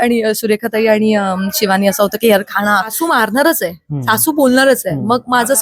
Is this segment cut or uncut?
cut